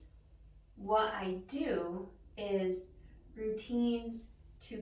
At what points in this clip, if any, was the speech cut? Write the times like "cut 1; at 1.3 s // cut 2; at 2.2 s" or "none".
cut 1; at 2.2 s